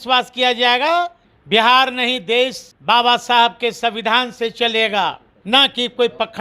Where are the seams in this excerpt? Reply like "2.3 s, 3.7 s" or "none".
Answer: 1.2 s, 2.7 s, 5.3 s